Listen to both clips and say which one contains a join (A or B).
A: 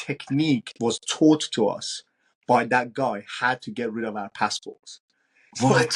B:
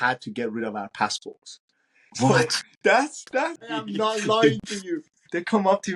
B